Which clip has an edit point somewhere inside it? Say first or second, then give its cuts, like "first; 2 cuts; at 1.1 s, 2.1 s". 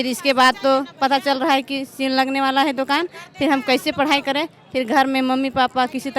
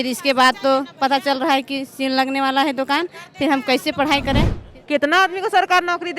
second; 1 cut; at 4.6 s